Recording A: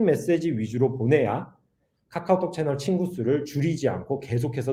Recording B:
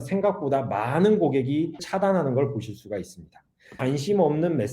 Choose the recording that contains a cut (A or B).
B